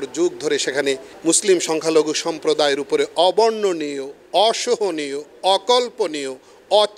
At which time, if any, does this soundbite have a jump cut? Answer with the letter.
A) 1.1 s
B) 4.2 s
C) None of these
A